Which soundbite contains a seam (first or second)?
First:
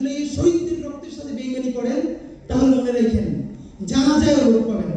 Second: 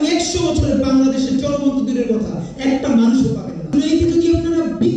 second